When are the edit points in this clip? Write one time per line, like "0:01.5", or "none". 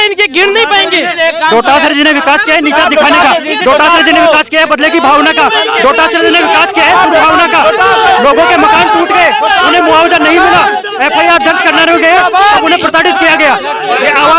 none